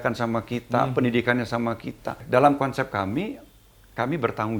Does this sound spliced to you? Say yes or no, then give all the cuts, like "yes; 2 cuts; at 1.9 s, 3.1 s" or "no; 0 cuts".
yes; 1 cut; at 2.2 s